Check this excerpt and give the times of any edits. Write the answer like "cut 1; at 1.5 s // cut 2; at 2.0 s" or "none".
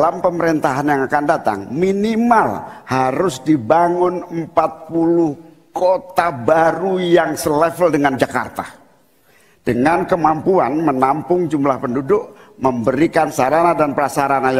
none